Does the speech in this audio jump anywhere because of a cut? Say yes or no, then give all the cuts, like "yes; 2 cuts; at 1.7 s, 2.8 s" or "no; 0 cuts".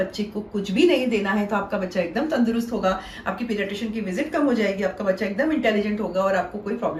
no; 0 cuts